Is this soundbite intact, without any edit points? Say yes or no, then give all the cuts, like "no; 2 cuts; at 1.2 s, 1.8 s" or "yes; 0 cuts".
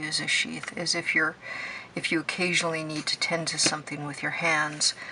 yes; 0 cuts